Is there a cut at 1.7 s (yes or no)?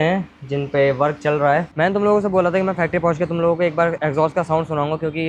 yes